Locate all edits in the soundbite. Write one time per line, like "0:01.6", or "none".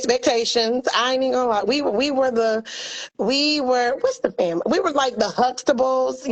none